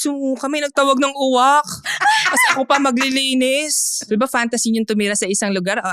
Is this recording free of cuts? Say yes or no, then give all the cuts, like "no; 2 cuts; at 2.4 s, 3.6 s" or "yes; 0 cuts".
no; 1 cut; at 4.0 s